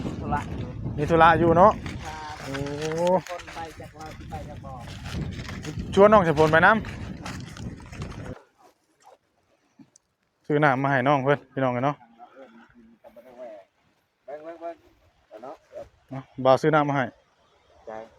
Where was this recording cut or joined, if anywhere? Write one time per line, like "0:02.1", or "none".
0:08.3